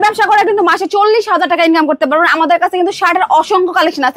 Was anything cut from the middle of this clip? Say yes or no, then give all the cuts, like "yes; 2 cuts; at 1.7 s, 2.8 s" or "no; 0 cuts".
no; 0 cuts